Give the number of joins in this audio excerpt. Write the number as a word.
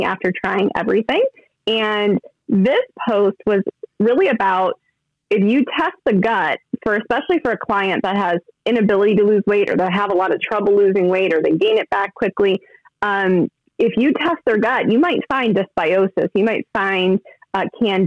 zero